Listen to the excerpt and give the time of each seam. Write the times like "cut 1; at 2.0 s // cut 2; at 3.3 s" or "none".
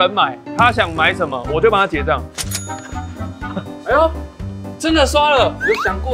none